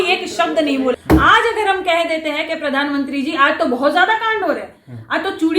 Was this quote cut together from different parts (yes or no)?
yes